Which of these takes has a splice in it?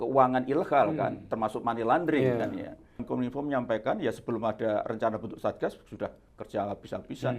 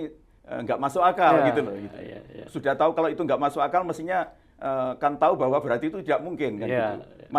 first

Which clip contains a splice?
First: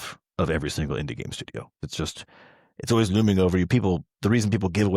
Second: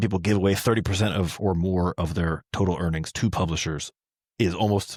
first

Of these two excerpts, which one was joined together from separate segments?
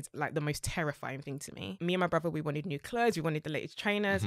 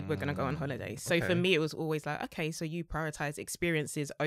first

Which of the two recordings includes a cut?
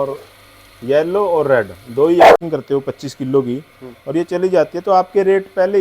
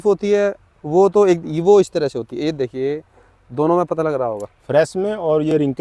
first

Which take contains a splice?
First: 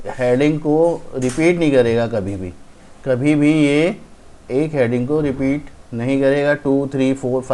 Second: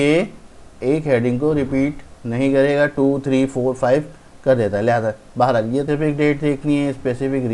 second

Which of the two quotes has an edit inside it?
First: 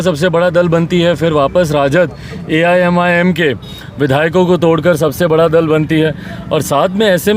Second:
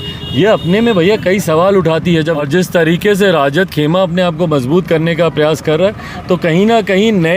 second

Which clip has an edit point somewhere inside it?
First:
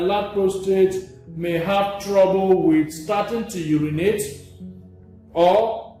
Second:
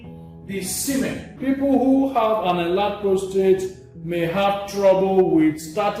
second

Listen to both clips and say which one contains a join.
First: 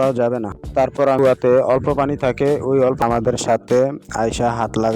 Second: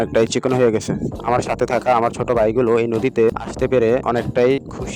first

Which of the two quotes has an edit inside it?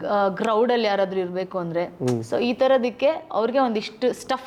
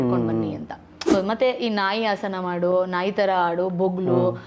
second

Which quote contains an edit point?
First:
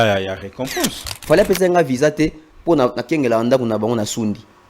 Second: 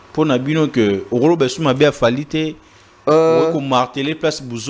first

